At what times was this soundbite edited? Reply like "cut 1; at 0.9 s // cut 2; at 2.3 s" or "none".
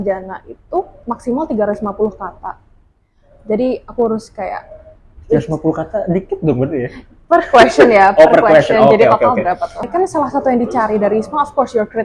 cut 1; at 1.0 s // cut 2; at 9.9 s

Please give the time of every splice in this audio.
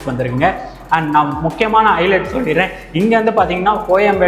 none

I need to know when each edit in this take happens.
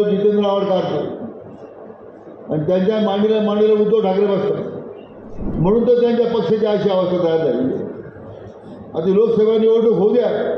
cut 1; at 5.4 s

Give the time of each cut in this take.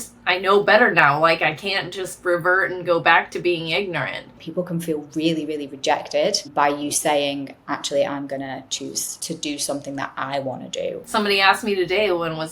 cut 1; at 4.4 s // cut 2; at 6.5 s // cut 3; at 9.1 s // cut 4; at 11.0 s

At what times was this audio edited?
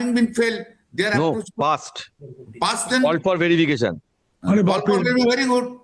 none

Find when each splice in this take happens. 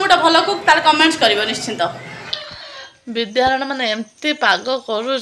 cut 1; at 2.4 s

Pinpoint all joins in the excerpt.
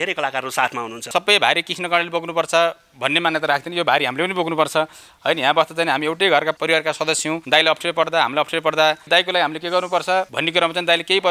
cut 1; at 1.0 s // cut 2; at 9.1 s

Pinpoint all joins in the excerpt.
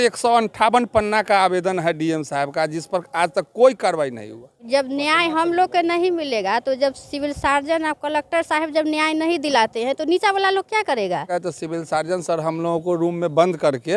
cut 1; at 4.5 s // cut 2; at 11.3 s

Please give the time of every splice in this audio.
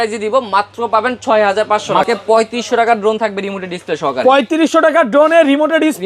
cut 1; at 2.1 s

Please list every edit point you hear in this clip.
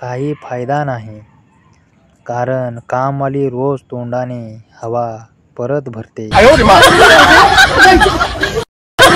none

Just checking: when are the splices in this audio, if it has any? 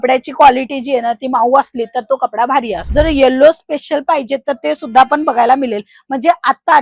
cut 1; at 2.8 s

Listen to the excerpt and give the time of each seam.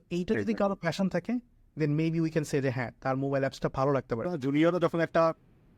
cut 1; at 4.3 s

